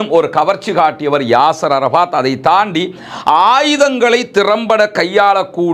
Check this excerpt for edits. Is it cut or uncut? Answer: uncut